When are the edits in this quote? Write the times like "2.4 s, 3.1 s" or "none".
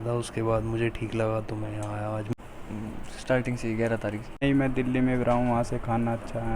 2.3 s, 4.4 s